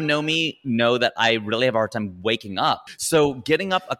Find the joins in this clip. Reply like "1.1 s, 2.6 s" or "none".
2.9 s